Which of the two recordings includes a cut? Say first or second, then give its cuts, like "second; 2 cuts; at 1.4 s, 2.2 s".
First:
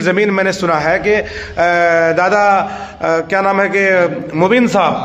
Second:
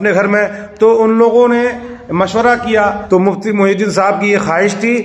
second; 1 cut; at 3.0 s